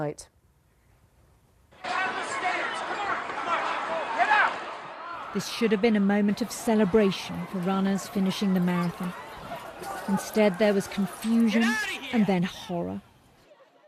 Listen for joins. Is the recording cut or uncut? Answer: uncut